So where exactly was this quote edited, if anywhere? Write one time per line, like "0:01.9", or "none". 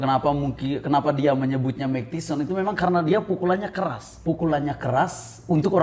0:04.1

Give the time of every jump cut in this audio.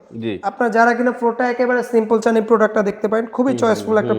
none

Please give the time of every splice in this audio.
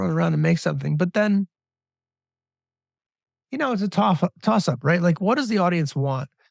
none

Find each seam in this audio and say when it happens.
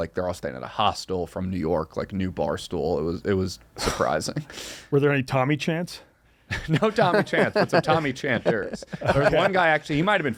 none

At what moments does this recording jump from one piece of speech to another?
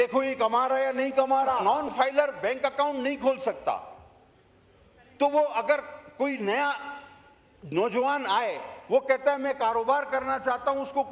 0:01.6

